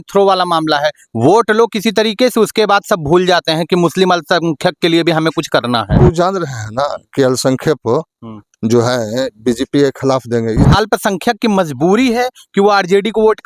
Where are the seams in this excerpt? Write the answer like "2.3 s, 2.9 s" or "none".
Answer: 6.0 s, 10.7 s